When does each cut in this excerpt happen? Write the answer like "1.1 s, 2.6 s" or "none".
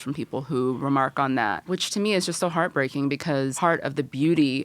1.6 s, 3.5 s

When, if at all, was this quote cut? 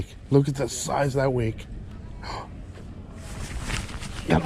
1.9 s

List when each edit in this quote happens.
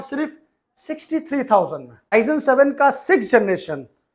2.1 s

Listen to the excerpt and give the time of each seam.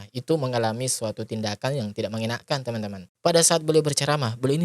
3.1 s

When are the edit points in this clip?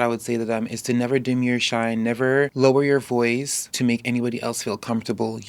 2.5 s, 3.6 s

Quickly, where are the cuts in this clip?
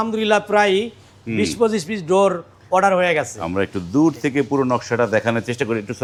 none

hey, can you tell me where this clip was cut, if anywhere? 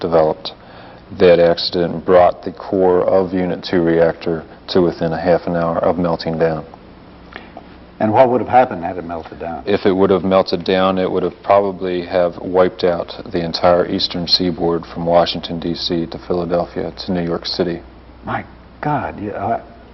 10.5 s

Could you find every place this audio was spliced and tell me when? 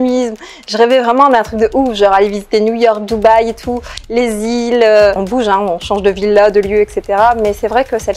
5.1 s

